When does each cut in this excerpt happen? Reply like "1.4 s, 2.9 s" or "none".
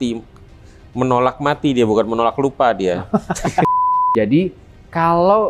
3.7 s